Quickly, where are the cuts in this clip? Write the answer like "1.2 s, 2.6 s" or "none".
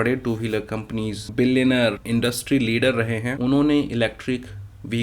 1.2 s, 2.0 s, 3.3 s